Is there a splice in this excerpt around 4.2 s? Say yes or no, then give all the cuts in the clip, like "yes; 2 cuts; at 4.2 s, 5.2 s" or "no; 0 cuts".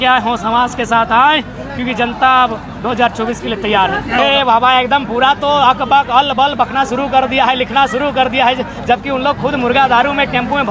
yes; 1 cut; at 4.2 s